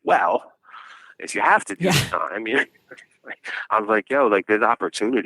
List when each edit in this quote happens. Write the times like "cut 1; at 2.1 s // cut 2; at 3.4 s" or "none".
cut 1; at 3.6 s

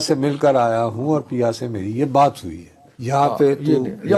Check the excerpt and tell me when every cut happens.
none

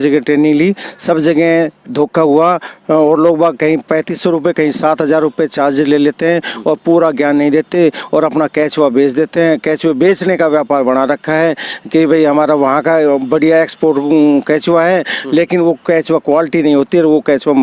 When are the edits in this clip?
none

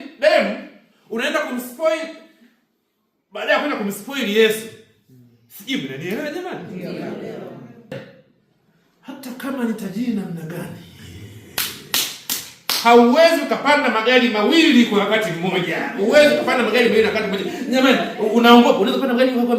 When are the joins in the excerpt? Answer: cut 1; at 7.9 s

